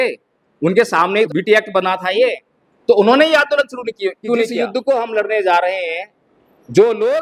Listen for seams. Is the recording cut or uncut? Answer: cut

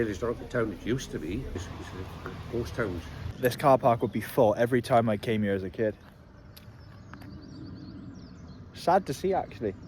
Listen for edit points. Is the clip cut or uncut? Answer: cut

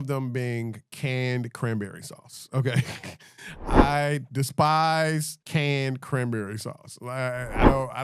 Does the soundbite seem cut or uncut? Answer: uncut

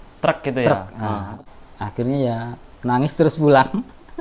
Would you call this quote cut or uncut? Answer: cut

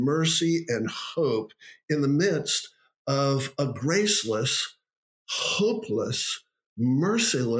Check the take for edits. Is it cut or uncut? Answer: uncut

